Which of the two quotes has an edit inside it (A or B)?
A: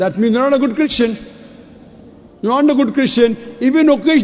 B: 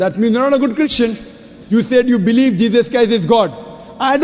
B